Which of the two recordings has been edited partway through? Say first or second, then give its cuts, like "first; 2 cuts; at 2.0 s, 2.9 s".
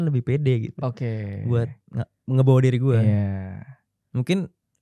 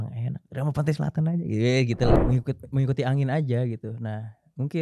second; 1 cut; at 2.2 s